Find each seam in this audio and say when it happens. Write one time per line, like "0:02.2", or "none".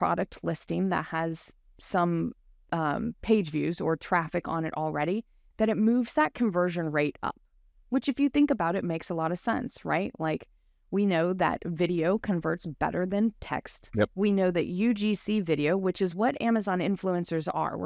none